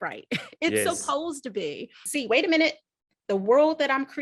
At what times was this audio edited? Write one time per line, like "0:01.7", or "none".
0:02.0